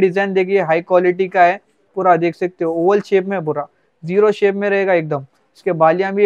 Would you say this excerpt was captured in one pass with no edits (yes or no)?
yes